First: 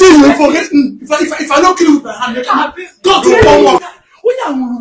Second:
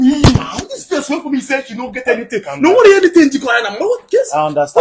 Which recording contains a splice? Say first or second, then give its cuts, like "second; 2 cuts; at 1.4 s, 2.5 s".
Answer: first; 1 cut; at 3.8 s